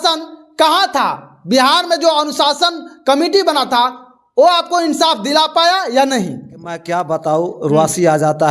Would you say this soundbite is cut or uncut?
cut